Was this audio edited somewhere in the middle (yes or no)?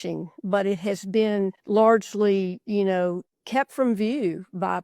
yes